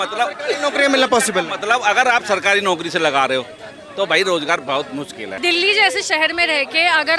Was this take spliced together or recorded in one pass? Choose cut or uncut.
cut